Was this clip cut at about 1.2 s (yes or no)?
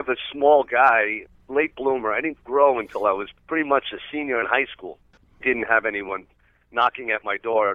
yes